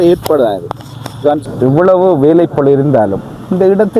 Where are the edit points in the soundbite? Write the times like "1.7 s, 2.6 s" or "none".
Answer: 1.4 s